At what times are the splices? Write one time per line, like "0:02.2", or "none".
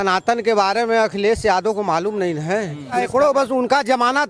0:02.9